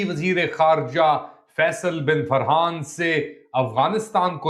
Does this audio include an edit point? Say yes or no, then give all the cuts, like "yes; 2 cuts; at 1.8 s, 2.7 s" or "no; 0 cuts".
no; 0 cuts